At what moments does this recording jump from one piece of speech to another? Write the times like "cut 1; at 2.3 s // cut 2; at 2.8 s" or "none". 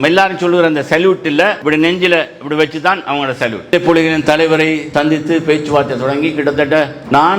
cut 1; at 3.7 s